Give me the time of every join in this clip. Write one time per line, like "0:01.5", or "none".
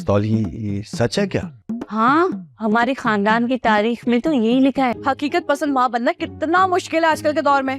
0:05.0